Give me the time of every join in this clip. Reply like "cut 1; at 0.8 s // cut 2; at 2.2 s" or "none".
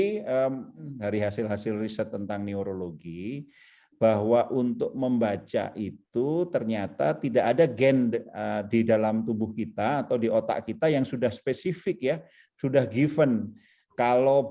cut 1; at 0.9 s

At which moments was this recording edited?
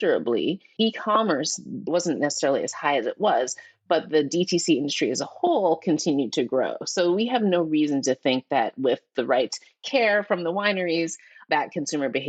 none

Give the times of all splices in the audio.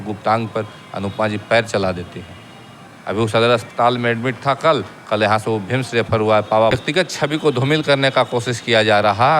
cut 1; at 6.8 s

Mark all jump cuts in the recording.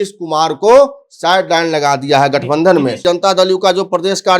cut 1; at 3.0 s

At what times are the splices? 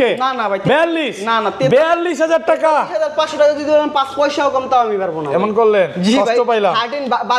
none

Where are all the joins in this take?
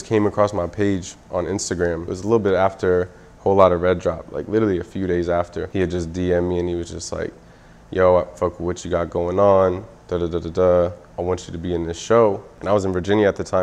cut 1; at 2.1 s // cut 2; at 5.6 s // cut 3; at 11.1 s // cut 4; at 12.5 s

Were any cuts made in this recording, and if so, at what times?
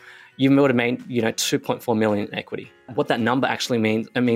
cut 1; at 2.9 s

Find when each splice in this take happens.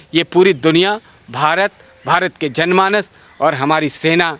none

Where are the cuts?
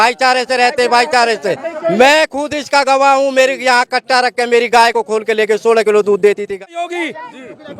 cut 1; at 6.7 s

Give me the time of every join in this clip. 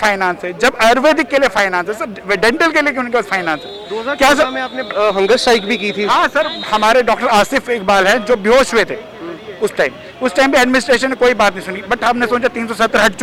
none

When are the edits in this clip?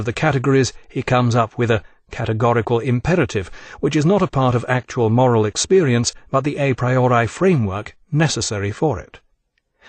cut 1; at 1.8 s

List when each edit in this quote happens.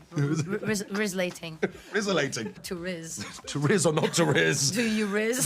cut 1; at 2.7 s

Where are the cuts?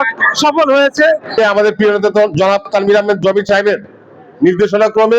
cut 1; at 1.3 s

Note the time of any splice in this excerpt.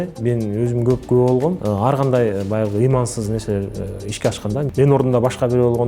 cut 1; at 1.6 s // cut 2; at 4.7 s

